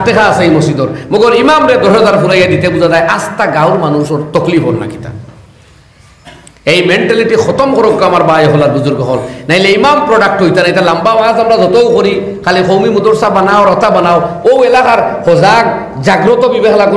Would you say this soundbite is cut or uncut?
uncut